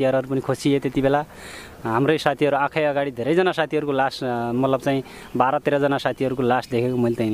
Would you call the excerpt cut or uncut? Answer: uncut